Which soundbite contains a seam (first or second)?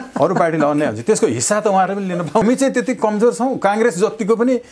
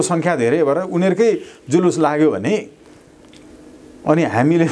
first